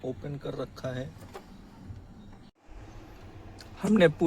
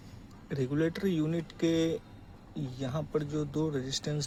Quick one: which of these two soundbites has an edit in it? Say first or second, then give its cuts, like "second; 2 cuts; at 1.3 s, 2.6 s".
first; 1 cut; at 2.5 s